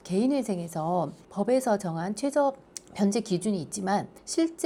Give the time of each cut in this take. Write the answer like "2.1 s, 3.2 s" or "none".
none